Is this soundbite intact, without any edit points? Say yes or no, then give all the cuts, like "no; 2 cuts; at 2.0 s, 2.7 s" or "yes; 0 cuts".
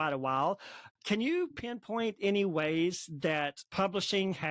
no; 1 cut; at 3.6 s